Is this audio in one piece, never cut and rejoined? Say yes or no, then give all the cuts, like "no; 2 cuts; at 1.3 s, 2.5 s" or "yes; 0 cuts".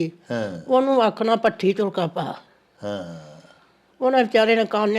yes; 0 cuts